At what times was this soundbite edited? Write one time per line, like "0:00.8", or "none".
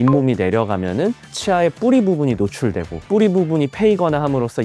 0:02.9